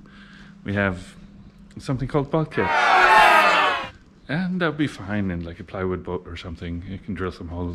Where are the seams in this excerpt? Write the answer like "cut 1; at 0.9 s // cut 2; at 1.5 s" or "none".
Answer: none

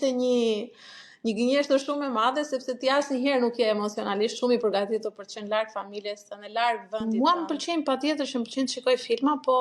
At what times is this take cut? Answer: cut 1; at 7.0 s

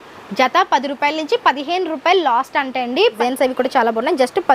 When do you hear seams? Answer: cut 1; at 3.2 s

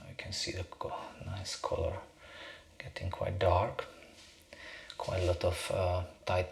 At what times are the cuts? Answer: none

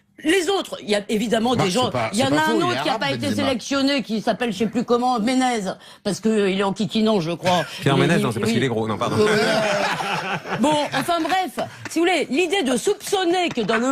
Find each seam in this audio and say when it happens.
cut 1; at 3.8 s

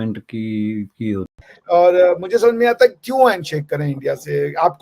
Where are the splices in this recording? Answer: cut 1; at 1.4 s

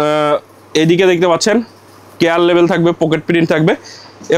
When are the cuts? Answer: none

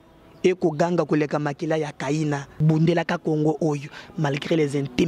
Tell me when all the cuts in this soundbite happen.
cut 1; at 2.6 s

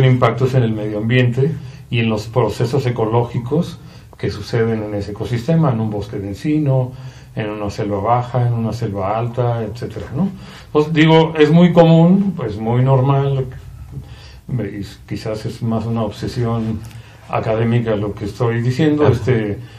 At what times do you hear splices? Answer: none

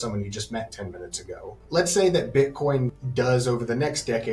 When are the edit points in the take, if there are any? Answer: cut 1; at 1.5 s // cut 2; at 3.0 s

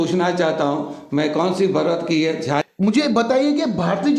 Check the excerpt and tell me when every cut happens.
cut 1; at 2.6 s

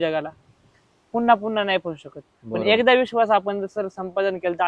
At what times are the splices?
none

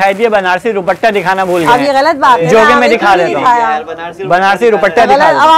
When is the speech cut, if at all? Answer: none

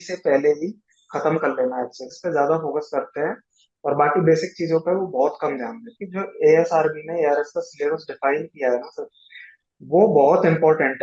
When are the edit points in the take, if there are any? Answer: cut 1; at 2.0 s // cut 2; at 6.0 s

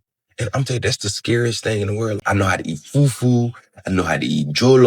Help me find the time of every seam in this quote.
cut 1; at 2.2 s

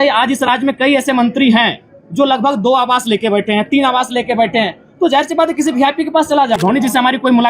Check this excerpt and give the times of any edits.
cut 1; at 6.6 s

